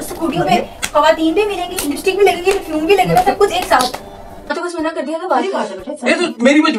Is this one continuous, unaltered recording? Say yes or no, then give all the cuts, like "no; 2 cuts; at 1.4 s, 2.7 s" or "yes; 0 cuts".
no; 1 cut; at 4.5 s